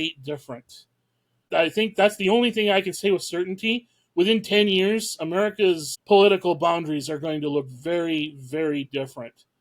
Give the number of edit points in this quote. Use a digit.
1